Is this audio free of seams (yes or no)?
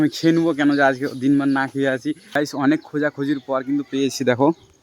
no